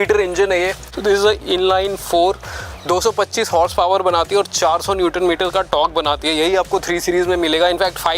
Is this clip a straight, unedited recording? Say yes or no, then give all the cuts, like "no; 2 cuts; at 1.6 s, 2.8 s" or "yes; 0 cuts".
yes; 0 cuts